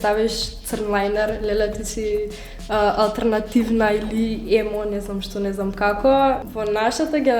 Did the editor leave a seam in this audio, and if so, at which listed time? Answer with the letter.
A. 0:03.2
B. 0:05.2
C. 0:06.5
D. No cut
C